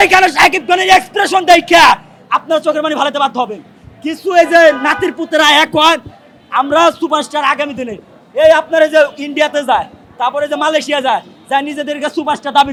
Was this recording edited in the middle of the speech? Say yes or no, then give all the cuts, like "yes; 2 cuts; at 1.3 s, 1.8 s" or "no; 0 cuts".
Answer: no; 0 cuts